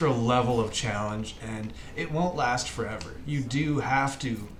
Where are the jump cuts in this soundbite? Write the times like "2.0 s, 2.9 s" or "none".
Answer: none